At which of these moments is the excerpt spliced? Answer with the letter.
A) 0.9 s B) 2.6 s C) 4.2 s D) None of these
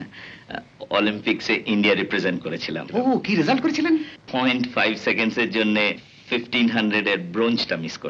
C